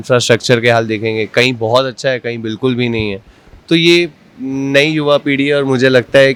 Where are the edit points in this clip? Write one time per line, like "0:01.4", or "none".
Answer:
none